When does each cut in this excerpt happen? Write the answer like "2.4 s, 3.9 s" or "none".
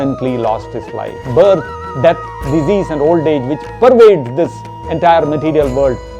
1.2 s